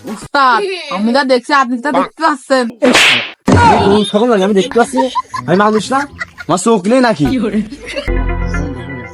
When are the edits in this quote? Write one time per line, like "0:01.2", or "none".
0:02.7
0:08.2